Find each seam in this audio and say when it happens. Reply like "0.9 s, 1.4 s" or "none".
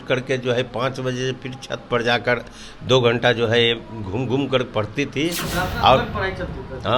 none